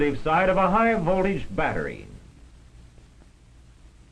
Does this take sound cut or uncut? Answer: uncut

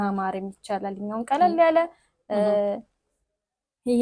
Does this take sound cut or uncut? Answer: uncut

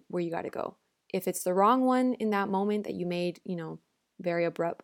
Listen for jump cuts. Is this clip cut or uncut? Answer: uncut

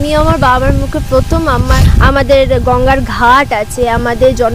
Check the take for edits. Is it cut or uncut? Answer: cut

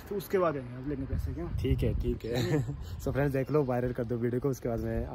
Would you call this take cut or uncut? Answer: uncut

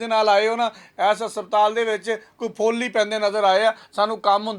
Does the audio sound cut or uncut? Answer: uncut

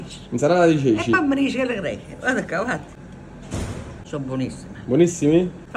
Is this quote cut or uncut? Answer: uncut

